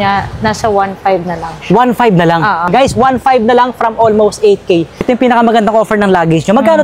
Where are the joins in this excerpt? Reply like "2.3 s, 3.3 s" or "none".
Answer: 2.7 s, 5.0 s